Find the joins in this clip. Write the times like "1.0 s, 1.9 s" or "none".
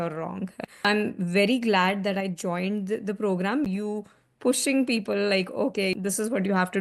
3.7 s